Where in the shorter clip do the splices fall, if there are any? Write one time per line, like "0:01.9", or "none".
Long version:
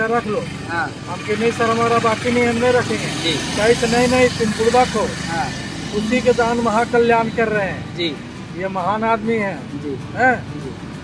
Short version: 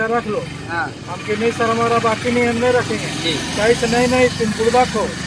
none